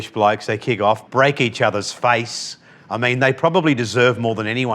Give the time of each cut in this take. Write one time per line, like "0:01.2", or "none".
0:01.0